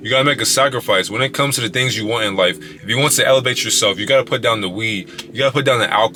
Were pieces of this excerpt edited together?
no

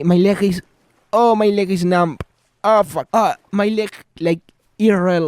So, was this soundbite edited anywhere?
yes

